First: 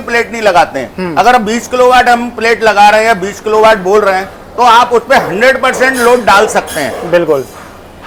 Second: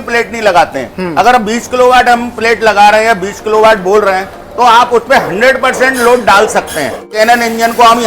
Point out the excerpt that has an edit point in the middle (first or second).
second